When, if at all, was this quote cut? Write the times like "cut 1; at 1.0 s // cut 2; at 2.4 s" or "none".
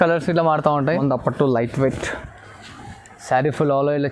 cut 1; at 0.9 s